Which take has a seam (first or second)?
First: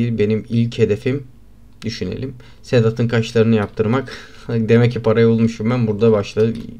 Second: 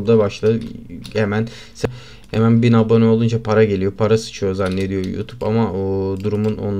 second